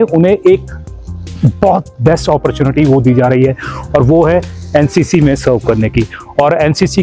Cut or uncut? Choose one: uncut